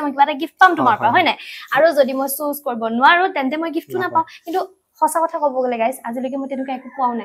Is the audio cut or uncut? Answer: uncut